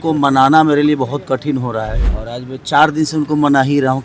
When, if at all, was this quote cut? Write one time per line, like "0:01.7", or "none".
0:02.1